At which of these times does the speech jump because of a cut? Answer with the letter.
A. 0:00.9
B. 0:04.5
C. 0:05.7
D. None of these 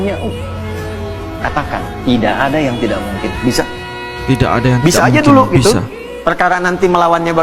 D